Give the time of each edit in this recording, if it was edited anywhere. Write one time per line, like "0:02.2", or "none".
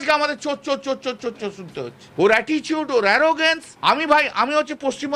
0:02.0
0:03.7

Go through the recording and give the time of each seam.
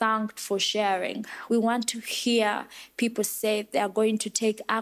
0:01.3

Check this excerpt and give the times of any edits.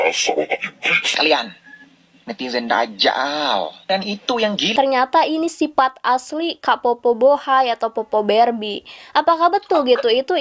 0:04.6

